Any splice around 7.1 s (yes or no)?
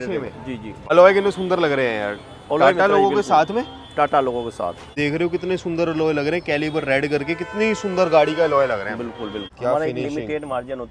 no